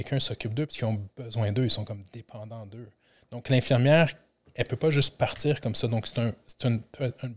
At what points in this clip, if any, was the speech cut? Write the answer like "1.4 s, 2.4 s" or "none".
none